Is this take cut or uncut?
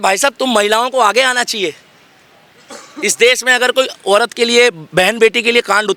uncut